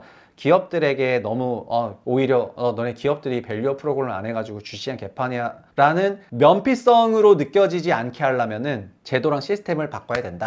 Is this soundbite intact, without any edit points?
no; 4 cuts; at 2.0 s, 5.6 s, 6.2 s, 8.9 s

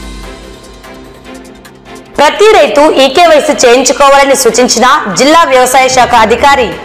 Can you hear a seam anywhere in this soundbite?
yes; 1 cut; at 1.9 s

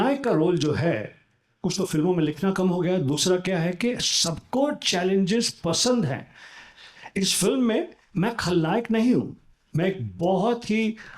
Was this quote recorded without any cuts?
yes; 0 cuts

